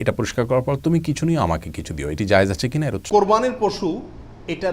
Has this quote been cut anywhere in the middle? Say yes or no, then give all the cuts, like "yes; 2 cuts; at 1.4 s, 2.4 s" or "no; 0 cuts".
yes; 1 cut; at 3.0 s